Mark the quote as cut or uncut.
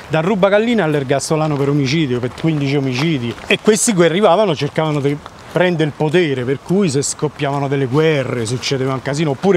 uncut